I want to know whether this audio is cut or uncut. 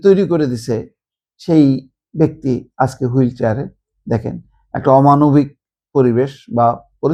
uncut